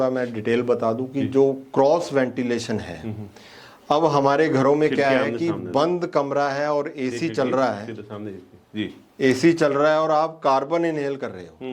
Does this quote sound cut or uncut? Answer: uncut